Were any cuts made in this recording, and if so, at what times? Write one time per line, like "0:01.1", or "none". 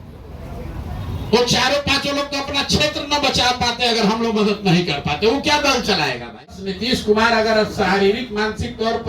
0:06.7

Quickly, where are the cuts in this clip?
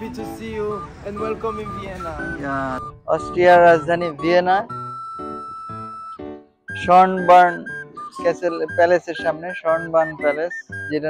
0:02.8

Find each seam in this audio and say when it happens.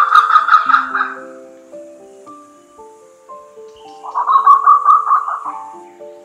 0:01.2
0:03.7

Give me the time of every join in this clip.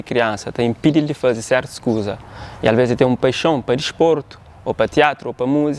none

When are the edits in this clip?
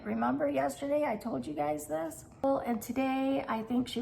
0:02.4

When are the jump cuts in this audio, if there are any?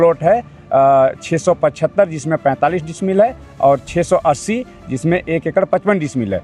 none

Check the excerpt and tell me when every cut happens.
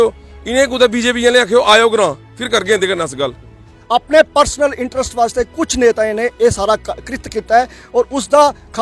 0:03.7

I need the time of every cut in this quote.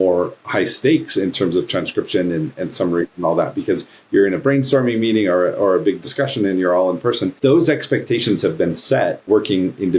0:07.3
0:09.3

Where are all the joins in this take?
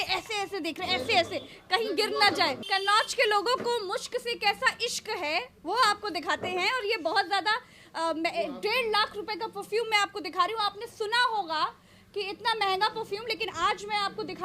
0:02.6

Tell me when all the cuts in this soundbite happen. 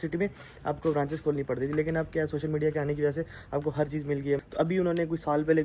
0:04.4

